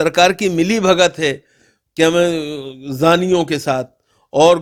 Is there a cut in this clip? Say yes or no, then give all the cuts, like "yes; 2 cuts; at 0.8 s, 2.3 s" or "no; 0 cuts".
no; 0 cuts